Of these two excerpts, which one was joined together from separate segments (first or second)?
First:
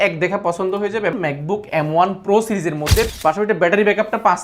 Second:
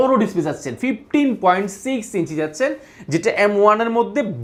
first